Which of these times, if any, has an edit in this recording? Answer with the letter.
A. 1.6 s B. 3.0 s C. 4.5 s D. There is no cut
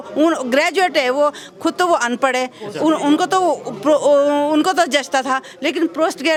D